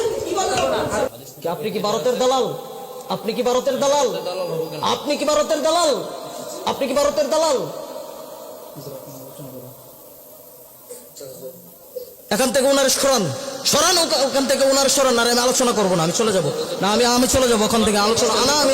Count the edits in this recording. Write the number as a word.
one